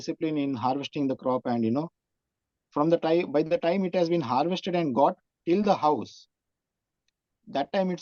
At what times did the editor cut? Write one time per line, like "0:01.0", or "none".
none